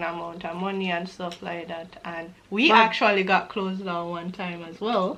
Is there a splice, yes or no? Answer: no